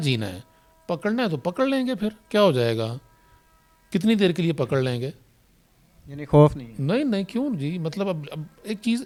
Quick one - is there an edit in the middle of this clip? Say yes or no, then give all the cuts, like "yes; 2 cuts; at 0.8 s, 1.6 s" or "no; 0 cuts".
no; 0 cuts